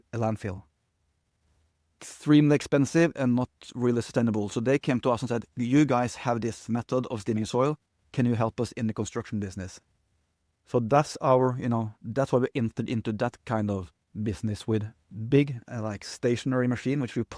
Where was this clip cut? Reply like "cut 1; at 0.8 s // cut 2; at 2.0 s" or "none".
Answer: none